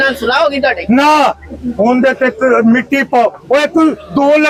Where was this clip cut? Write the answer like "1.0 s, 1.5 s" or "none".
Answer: none